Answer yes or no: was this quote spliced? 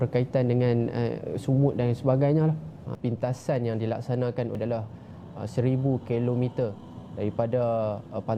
yes